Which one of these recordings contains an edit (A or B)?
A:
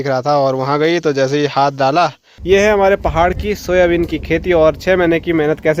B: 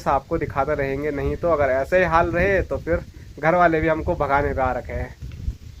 A